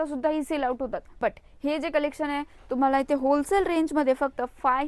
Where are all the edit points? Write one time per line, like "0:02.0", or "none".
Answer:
0:01.1